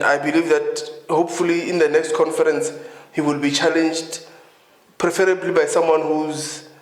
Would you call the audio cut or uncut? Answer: uncut